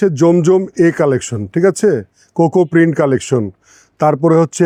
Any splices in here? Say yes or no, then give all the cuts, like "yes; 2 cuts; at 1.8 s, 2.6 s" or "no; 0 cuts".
no; 0 cuts